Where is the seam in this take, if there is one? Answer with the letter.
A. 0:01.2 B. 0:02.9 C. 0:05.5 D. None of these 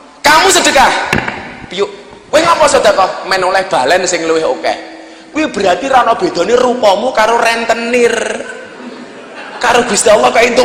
D